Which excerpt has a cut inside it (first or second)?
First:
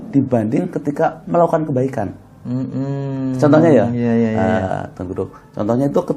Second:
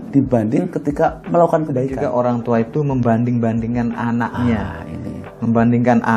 second